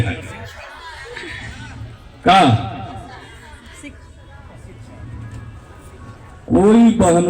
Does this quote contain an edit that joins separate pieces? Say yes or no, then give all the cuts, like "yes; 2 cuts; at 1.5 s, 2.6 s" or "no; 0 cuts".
no; 0 cuts